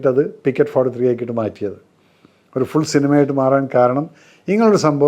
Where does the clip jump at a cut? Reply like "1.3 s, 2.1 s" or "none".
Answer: none

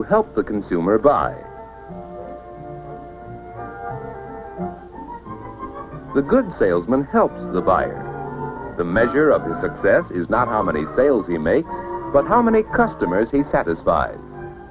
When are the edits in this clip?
8.5 s

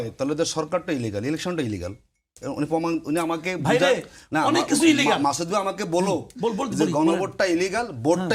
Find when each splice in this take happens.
none

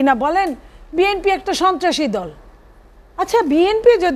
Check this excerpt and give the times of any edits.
none

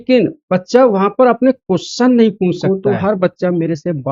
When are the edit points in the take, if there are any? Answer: 3.0 s

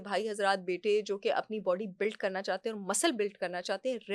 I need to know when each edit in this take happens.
none

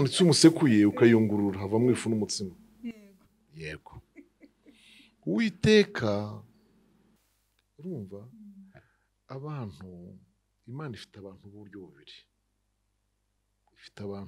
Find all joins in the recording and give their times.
none

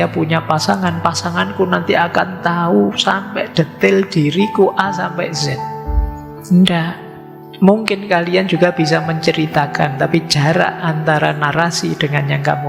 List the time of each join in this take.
7.5 s

